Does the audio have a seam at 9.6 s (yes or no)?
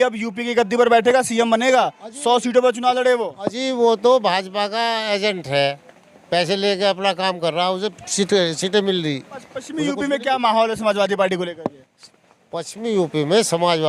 yes